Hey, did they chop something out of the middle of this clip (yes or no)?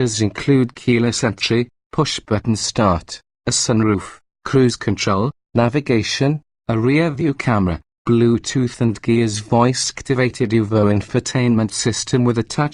no